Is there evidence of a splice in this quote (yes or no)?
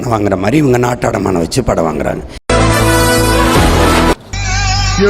yes